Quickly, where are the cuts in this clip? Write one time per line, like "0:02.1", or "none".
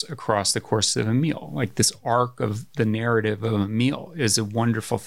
none